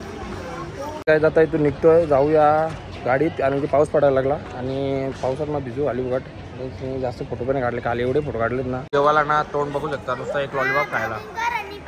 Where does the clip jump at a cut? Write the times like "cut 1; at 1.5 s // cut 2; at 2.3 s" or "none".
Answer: cut 1; at 1.0 s // cut 2; at 8.8 s